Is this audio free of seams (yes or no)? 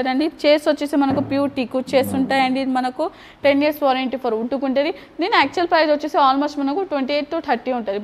yes